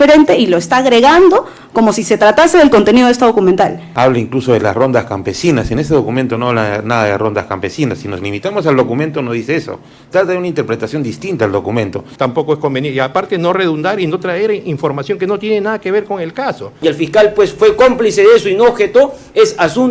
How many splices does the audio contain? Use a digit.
3